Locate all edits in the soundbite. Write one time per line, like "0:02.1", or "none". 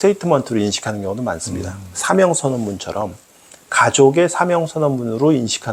none